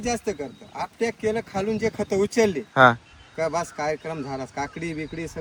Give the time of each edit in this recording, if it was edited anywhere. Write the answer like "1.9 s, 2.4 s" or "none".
none